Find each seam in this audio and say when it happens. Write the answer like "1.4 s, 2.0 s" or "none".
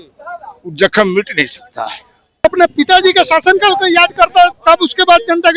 2.4 s